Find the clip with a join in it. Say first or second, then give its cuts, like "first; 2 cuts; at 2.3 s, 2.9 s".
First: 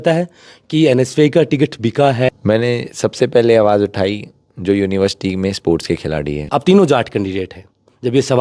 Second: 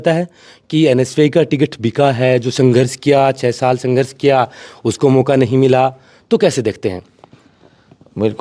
first; 2 cuts; at 2.3 s, 6.5 s